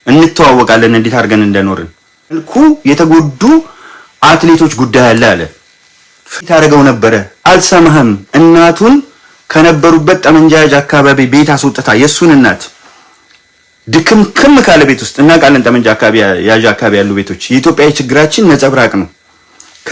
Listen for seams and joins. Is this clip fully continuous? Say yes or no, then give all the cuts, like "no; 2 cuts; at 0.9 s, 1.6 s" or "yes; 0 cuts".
no; 2 cuts; at 2.5 s, 6.4 s